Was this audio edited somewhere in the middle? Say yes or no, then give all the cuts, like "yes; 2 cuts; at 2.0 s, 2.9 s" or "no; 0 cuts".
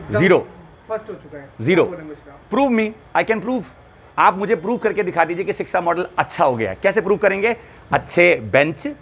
no; 0 cuts